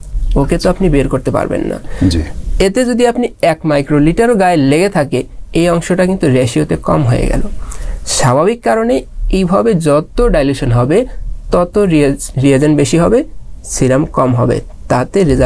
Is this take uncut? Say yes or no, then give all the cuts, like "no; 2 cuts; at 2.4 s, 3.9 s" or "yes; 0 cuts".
yes; 0 cuts